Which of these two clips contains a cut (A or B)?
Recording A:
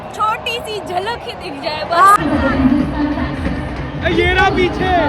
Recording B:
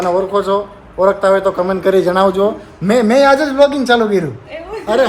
A